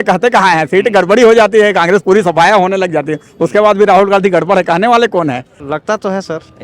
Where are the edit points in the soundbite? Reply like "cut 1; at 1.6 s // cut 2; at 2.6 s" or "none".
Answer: cut 1; at 5.6 s